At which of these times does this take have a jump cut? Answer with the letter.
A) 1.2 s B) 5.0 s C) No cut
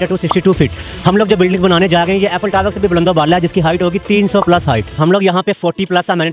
B